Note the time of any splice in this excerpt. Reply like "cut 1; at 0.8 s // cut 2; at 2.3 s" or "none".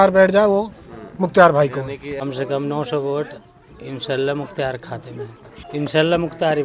cut 1; at 2.2 s // cut 2; at 5.6 s